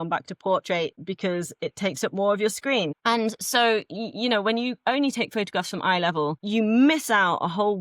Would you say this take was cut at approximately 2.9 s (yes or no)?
yes